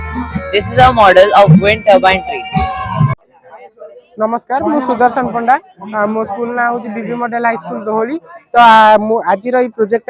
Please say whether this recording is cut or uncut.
cut